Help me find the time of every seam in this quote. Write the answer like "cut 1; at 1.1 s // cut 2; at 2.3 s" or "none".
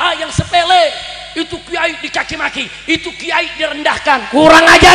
none